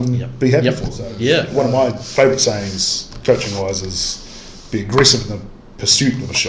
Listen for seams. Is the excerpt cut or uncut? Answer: cut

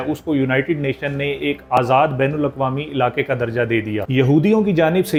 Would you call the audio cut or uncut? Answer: uncut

